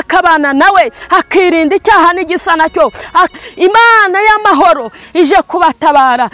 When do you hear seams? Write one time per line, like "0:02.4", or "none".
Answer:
0:03.4

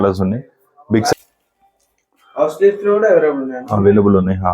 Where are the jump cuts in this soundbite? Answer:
0:01.1

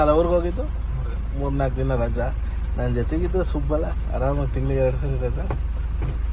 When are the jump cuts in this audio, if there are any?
none

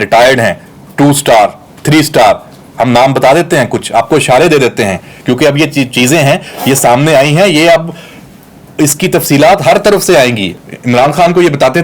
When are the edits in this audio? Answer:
0:10.5

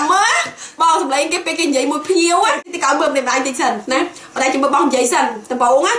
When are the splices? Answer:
0:02.7

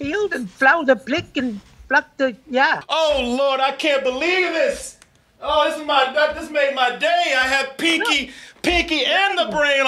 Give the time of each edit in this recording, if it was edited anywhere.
0:02.8

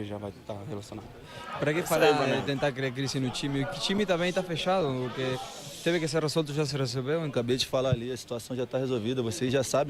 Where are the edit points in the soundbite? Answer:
0:01.3
0:07.3

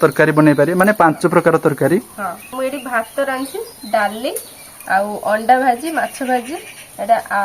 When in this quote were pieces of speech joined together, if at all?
0:02.5

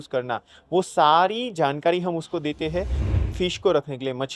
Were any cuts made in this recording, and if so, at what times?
0:03.0

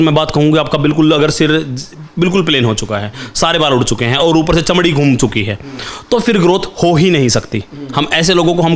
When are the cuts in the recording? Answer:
none

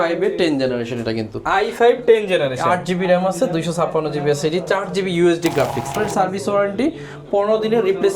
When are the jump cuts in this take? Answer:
0:05.9

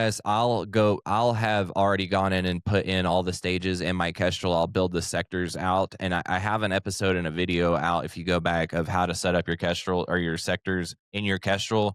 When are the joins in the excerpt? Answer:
0:11.0

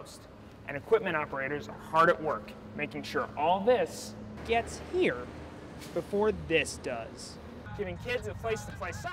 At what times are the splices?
0:07.5

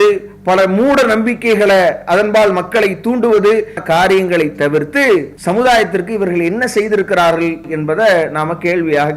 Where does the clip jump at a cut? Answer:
0:03.8
0:05.3
0:07.7

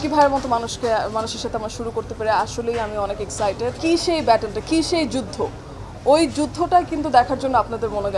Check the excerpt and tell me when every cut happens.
0:03.8

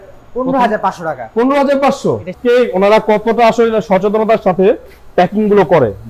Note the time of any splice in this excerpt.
0:02.3

